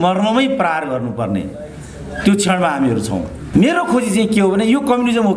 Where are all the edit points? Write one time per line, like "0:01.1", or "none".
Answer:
0:03.4

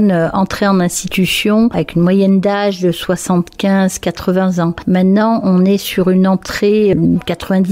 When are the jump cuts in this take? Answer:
none

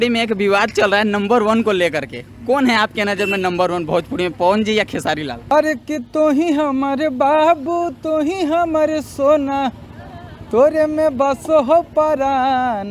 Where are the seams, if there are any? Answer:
0:05.5

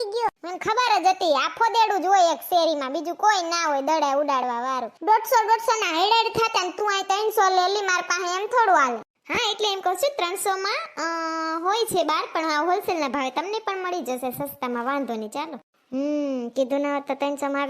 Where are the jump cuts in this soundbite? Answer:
0:04.9

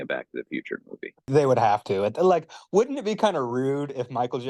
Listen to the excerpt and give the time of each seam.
0:01.3

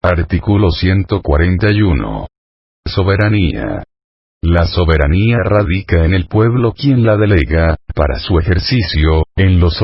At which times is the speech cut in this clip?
0:01.5

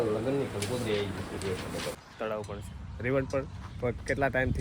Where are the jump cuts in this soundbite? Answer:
0:01.9

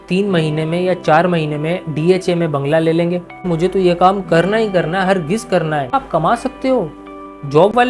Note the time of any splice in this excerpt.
0:03.5
0:05.9

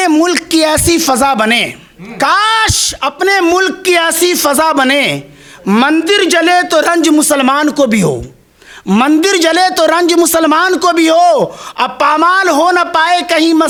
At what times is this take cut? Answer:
none

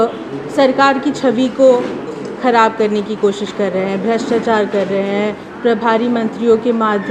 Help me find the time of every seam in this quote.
none

